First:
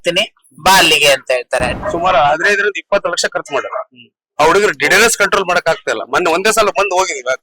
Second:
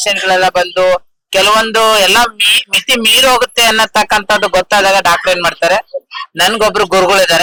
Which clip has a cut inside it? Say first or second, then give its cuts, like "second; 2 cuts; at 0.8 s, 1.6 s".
first; 1 cut; at 1.7 s